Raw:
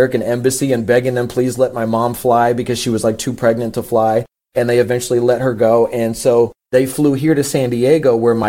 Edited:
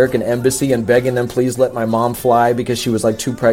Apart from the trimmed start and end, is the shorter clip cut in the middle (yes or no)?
no